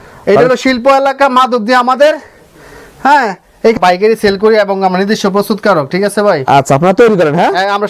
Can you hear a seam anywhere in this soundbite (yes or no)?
yes